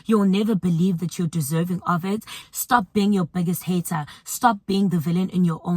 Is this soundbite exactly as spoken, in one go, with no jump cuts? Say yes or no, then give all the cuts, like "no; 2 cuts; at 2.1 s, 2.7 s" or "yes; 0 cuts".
no; 1 cut; at 2.3 s